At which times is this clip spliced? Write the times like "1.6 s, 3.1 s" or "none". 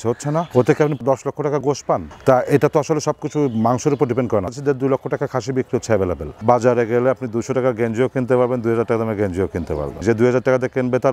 2.1 s, 4.5 s, 6.4 s, 10.0 s

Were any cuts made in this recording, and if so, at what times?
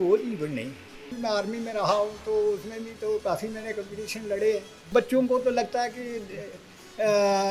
1.1 s, 4.9 s

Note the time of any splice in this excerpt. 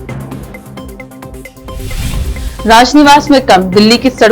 1.5 s

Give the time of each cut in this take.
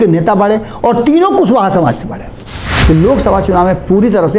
2.7 s

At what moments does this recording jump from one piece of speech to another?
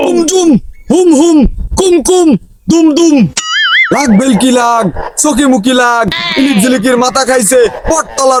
none

